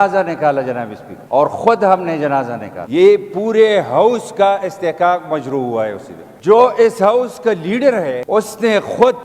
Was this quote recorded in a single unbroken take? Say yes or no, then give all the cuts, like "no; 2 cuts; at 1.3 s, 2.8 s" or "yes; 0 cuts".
no; 2 cuts; at 2.8 s, 6.3 s